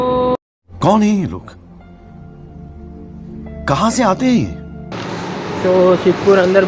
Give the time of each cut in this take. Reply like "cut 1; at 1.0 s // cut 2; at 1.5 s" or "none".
cut 1; at 4.9 s